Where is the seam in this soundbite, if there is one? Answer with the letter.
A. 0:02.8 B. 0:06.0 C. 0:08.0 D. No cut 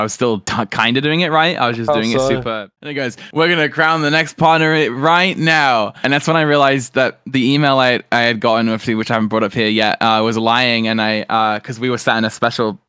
A